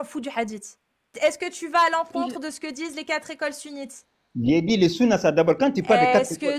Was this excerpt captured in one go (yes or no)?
no